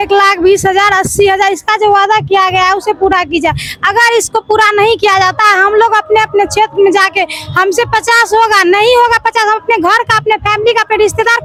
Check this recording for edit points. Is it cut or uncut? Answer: uncut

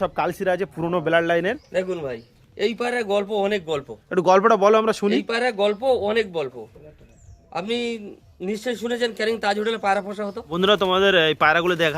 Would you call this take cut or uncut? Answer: cut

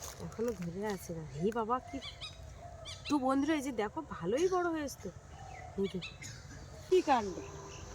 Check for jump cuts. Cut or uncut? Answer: cut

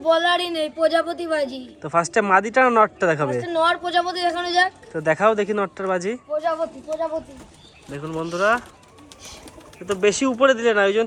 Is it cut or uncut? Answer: uncut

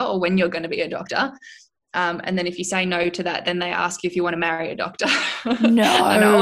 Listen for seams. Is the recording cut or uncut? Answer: uncut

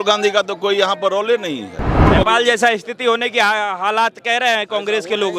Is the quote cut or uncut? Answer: cut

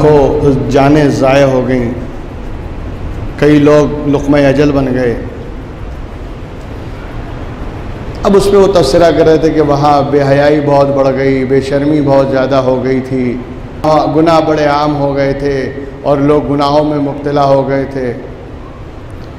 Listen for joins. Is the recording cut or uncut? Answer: cut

